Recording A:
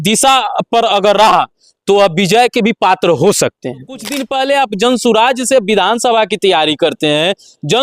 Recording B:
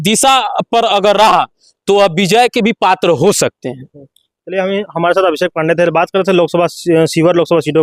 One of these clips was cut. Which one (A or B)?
A